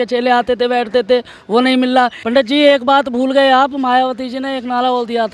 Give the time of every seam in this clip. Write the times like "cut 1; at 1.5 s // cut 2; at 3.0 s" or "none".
cut 1; at 2.2 s